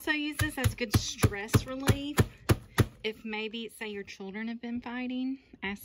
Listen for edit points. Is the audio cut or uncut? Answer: uncut